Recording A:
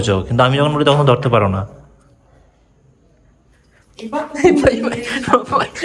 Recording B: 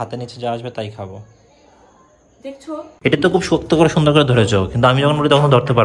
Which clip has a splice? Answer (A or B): B